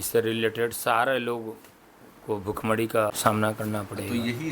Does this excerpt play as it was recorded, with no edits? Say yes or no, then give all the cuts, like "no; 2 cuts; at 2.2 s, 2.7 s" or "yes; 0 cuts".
no; 1 cut; at 3.2 s